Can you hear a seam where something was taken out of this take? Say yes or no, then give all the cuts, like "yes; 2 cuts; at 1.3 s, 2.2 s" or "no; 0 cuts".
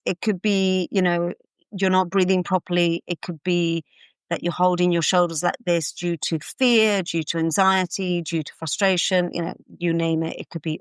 no; 0 cuts